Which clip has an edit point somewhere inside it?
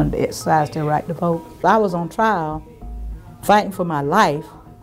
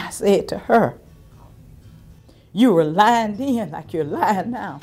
first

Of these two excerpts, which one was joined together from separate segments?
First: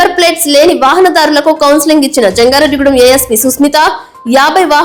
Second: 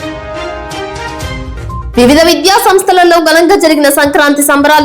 second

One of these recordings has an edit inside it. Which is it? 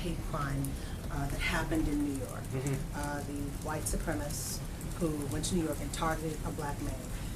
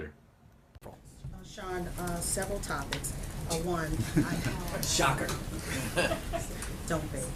first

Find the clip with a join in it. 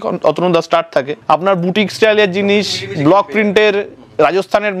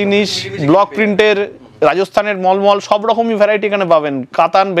first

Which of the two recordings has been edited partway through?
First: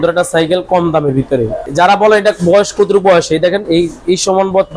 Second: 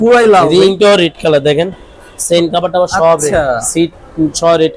first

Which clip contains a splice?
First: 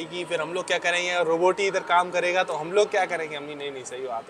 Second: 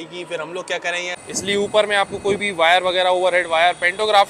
second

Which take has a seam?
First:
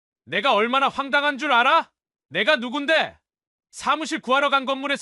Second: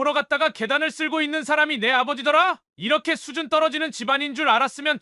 second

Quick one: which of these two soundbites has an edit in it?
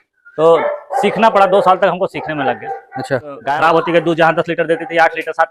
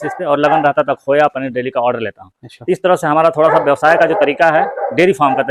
first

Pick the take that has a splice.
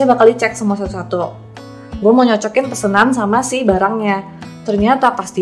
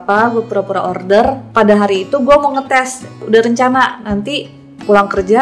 second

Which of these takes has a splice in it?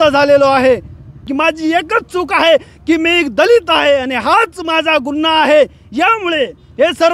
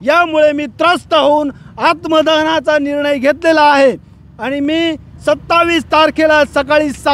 first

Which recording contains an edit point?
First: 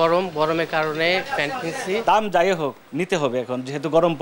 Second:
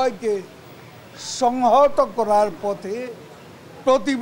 first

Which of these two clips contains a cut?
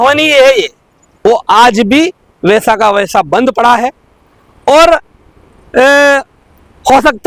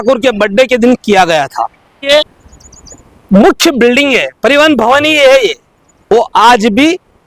second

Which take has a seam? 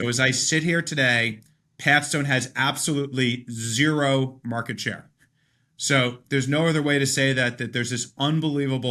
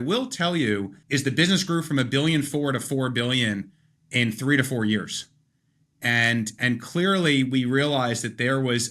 second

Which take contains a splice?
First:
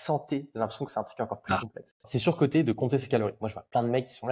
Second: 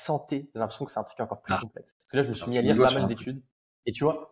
first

